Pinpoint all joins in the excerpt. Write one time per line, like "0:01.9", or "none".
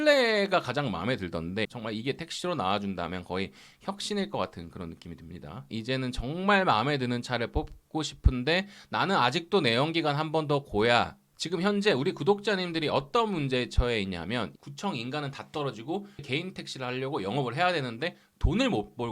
0:01.7
0:05.6
0:11.3
0:14.5
0:16.2